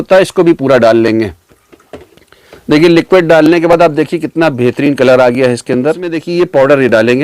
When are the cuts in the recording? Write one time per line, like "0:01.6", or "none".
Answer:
0:06.2